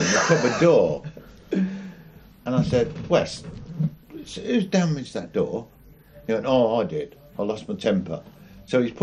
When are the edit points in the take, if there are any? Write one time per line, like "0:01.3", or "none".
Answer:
none

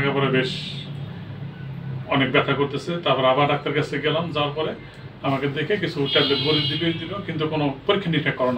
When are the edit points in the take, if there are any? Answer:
none

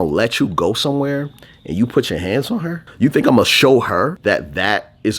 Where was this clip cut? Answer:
0:02.8
0:04.2

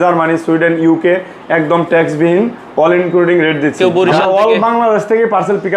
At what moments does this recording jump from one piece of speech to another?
0:03.8

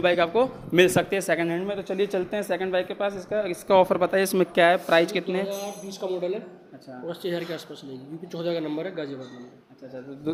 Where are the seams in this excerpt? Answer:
none

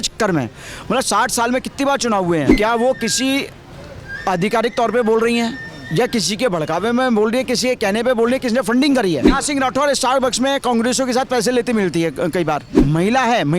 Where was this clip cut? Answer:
0:02.5
0:09.3
0:12.7

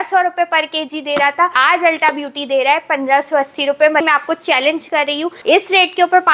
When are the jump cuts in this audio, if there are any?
0:01.6
0:04.0
0:05.4

